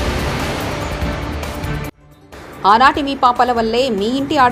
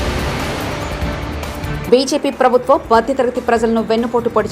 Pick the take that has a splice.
second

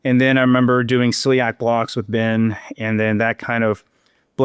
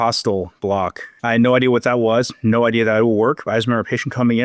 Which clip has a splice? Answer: second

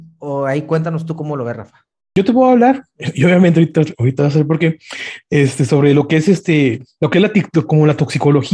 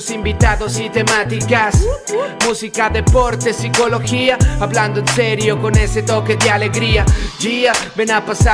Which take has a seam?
first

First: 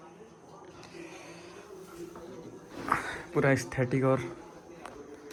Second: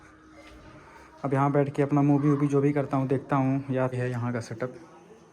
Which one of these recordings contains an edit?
second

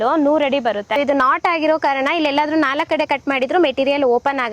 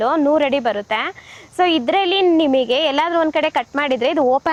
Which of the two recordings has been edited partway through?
first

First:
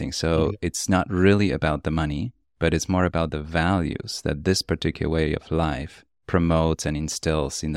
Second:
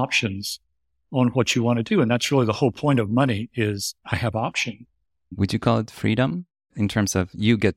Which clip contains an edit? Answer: second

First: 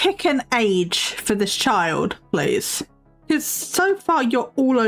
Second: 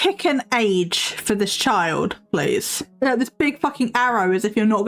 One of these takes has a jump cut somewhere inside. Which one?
second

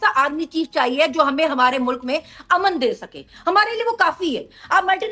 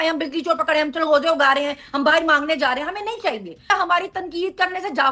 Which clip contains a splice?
second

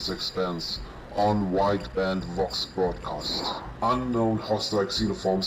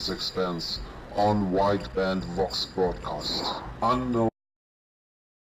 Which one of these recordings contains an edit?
first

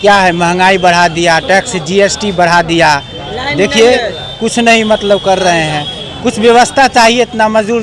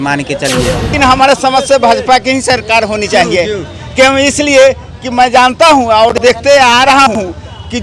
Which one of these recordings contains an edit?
second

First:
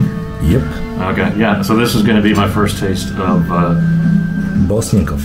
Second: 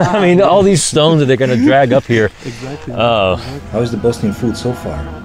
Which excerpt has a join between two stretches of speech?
second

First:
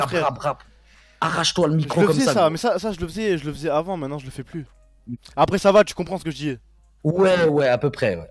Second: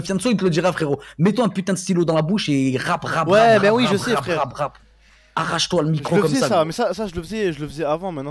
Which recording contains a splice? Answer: first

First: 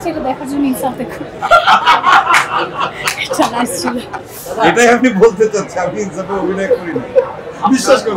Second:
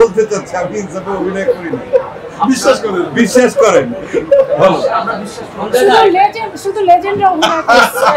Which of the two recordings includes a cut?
first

